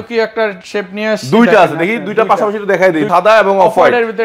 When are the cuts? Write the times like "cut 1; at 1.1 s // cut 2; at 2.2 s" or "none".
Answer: cut 1; at 3.1 s